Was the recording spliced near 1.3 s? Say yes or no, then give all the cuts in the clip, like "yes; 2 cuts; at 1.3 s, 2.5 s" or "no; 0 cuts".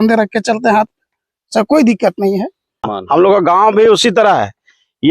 no; 1 cut; at 2.9 s